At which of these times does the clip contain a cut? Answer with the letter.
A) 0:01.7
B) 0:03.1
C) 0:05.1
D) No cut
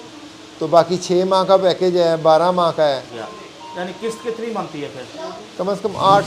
B